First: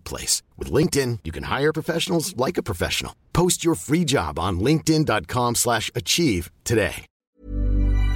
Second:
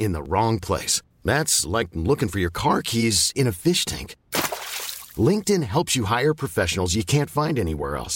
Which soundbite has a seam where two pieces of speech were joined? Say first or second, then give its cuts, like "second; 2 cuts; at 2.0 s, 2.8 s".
first; 1 cut; at 7.2 s